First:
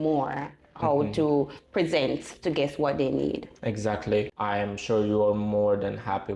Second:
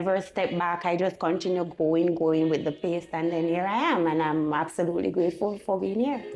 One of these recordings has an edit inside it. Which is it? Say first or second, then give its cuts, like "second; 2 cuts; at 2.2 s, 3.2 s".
first; 1 cut; at 4.3 s